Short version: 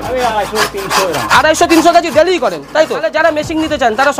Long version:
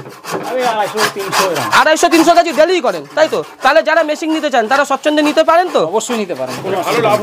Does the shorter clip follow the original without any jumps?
no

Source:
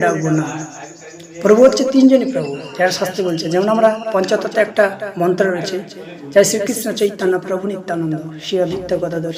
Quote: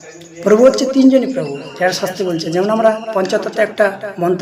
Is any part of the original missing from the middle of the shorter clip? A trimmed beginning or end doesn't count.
no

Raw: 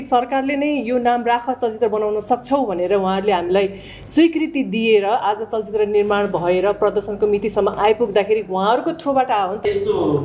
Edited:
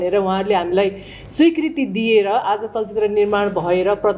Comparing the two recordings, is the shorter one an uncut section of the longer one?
yes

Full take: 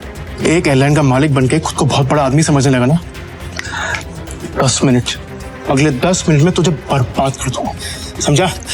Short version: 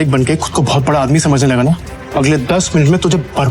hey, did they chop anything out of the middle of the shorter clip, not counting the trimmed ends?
yes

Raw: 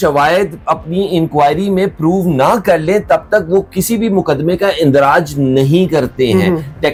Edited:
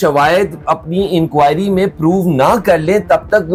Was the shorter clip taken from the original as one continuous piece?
yes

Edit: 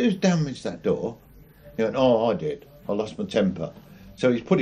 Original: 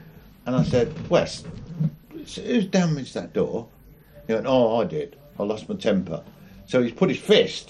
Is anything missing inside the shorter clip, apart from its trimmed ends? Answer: no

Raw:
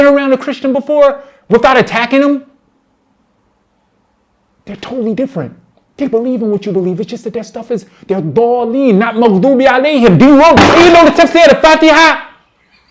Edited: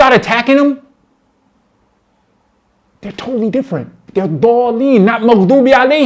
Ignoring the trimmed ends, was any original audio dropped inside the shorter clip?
yes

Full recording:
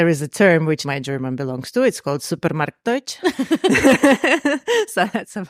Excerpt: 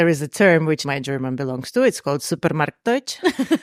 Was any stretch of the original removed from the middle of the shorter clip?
no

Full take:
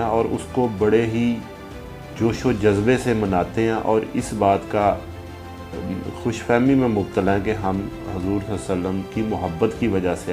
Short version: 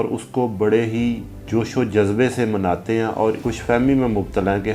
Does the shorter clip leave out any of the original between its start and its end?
yes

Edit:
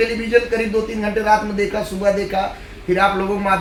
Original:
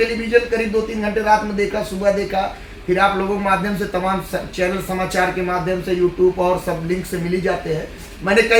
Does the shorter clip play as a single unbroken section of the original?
yes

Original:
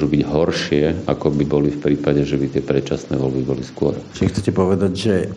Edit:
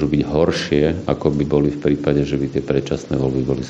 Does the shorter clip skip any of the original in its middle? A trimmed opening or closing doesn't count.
no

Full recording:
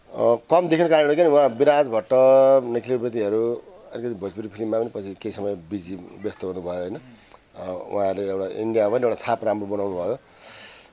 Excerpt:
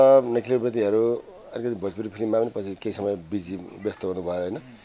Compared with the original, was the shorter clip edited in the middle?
no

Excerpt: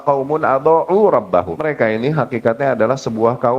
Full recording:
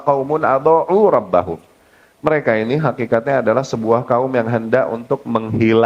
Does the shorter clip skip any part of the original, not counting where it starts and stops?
yes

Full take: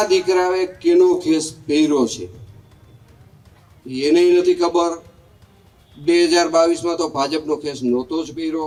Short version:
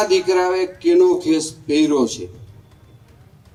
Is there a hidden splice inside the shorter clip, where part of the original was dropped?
no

